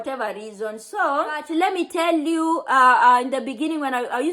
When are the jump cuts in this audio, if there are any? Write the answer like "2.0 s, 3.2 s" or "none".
1.4 s